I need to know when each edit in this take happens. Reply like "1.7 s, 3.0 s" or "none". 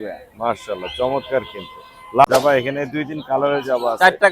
2.3 s